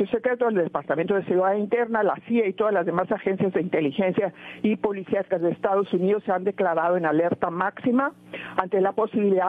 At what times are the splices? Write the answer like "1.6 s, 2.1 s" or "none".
none